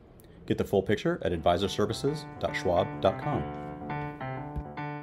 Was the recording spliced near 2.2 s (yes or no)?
no